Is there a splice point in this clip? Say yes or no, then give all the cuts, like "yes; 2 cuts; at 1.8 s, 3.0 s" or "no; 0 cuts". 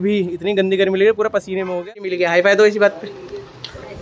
yes; 1 cut; at 2.1 s